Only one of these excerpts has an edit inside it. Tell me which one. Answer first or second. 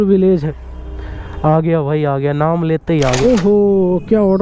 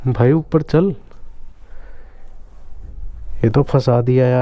first